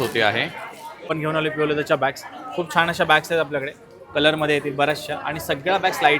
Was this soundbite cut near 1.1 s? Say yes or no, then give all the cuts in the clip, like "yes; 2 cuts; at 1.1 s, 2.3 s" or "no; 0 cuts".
yes; 1 cut; at 1.1 s